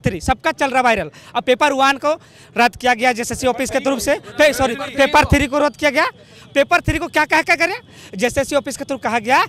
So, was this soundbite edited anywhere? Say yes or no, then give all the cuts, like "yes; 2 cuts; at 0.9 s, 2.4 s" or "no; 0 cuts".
no; 0 cuts